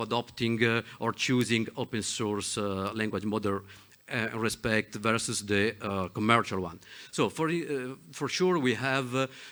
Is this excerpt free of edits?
yes; 0 cuts

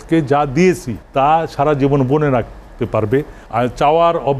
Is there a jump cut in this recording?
yes; 2 cuts; at 0.9 s, 3.4 s

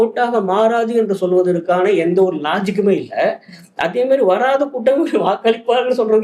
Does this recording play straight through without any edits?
yes; 0 cuts

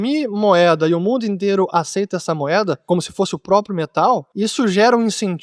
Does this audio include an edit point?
yes; 2 cuts; at 2.8 s, 4.3 s

